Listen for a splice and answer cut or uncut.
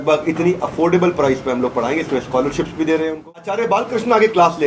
cut